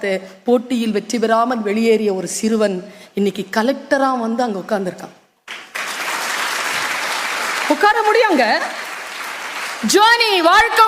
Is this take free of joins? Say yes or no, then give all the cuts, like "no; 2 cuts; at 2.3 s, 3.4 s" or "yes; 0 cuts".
yes; 0 cuts